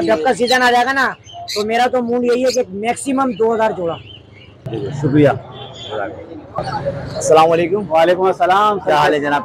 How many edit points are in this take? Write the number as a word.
one